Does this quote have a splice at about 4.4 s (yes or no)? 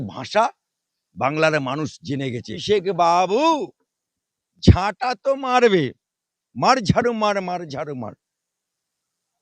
no